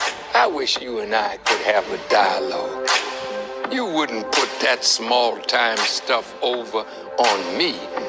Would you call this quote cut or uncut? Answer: uncut